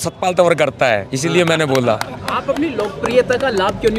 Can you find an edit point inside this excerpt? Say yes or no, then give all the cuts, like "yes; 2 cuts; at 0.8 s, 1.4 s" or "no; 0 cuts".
no; 0 cuts